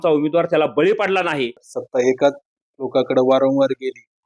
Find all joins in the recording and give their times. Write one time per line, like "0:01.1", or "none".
0:01.6